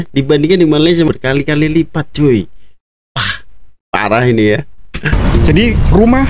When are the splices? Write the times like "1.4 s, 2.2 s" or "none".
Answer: 1.1 s, 5.3 s